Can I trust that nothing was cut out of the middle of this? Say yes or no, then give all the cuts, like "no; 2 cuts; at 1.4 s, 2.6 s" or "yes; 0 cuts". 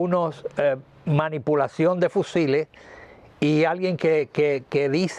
yes; 0 cuts